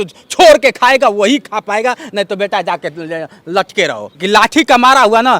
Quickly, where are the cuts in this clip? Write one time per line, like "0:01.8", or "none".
0:04.1